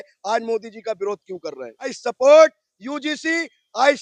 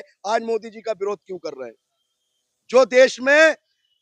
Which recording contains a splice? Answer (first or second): first